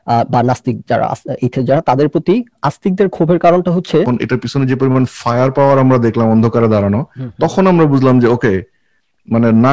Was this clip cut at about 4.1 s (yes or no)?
yes